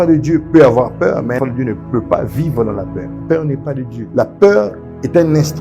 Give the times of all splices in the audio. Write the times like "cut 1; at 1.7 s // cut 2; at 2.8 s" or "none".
cut 1; at 1.4 s // cut 2; at 3.1 s // cut 3; at 4.0 s